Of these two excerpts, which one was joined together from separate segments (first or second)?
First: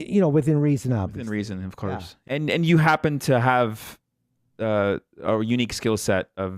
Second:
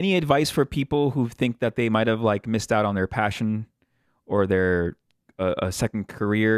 first